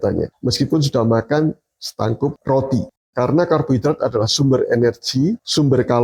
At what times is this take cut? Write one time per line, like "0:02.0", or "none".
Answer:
0:02.9